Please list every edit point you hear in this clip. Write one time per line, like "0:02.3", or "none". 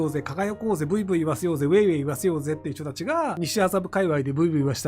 0:03.4